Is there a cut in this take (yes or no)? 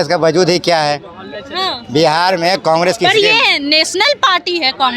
no